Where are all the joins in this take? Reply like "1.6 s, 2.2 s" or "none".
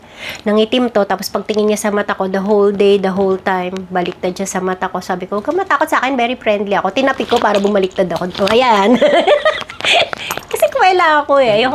none

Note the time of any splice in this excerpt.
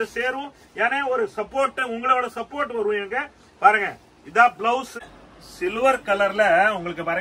4.9 s

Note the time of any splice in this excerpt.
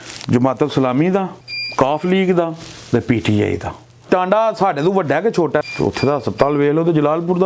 4.0 s, 5.6 s

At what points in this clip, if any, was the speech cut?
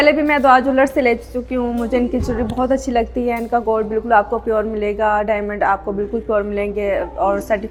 none

